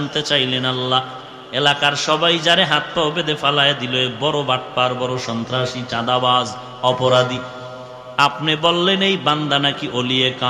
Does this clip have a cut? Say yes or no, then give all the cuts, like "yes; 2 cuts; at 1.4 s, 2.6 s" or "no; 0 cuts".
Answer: no; 0 cuts